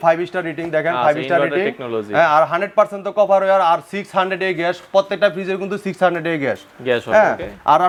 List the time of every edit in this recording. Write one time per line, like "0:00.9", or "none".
none